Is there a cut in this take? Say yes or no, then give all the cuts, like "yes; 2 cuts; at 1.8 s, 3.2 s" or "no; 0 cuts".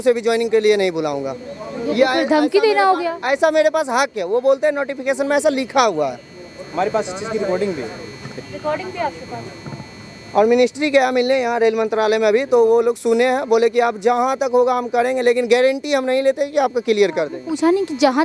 no; 0 cuts